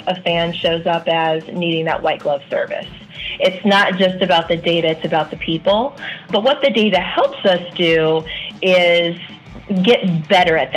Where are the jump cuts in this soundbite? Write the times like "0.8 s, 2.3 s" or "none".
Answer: 6.3 s